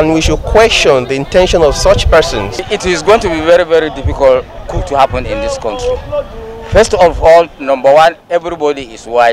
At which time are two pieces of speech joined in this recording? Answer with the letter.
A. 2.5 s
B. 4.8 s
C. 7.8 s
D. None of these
A